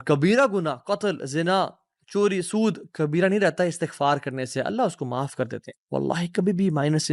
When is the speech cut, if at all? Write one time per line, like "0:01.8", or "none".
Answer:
0:05.7

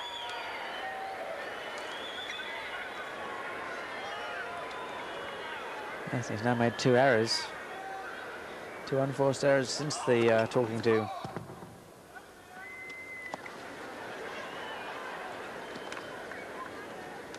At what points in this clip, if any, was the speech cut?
0:01.5

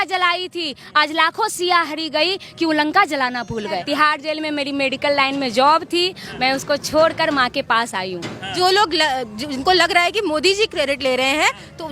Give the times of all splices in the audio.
0:03.7
0:08.5

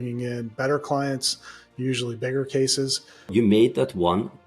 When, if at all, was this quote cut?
0:03.3

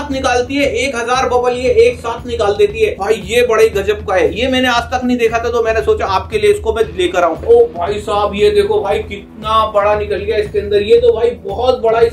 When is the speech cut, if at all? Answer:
0:03.0
0:07.4

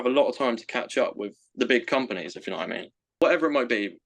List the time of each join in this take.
0:03.2

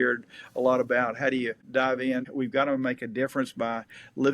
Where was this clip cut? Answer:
0:02.2

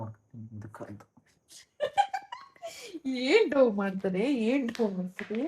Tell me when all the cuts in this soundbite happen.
0:01.5

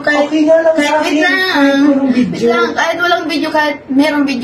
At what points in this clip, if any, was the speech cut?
none

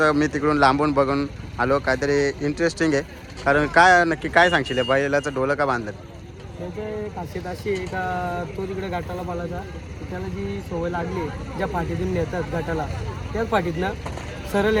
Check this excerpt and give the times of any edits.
none

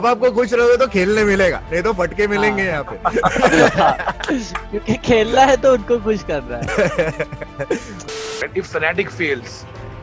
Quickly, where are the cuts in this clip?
0:08.1

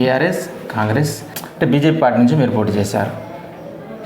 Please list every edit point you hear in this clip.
0:01.4

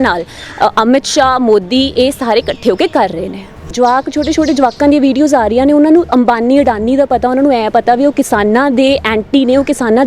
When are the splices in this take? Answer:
0:03.7

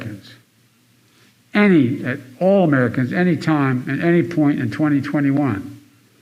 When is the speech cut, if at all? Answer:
none

